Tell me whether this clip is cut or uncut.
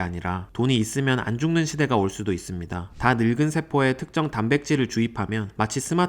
cut